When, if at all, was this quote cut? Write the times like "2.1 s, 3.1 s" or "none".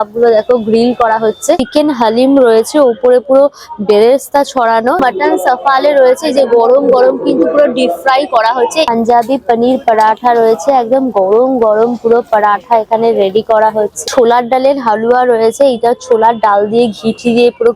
1.6 s, 5.0 s, 8.9 s, 14.0 s